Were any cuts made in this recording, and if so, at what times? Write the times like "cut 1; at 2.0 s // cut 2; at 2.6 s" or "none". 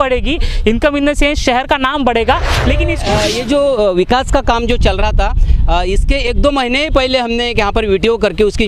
cut 1; at 3.0 s